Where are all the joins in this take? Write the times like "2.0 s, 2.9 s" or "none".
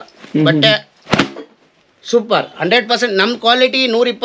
none